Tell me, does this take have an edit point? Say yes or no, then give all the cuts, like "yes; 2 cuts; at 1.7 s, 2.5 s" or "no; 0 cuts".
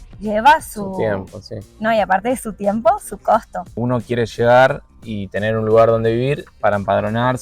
yes; 1 cut; at 3.7 s